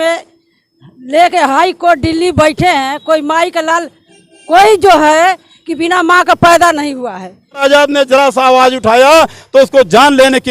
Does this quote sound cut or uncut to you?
cut